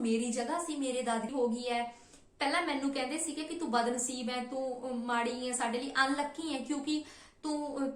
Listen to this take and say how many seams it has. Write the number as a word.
one